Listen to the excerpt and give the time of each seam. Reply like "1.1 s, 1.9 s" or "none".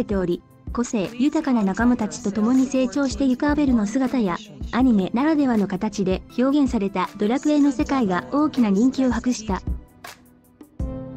9.6 s